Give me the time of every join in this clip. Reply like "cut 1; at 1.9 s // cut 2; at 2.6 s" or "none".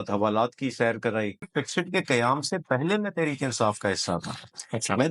cut 1; at 1.4 s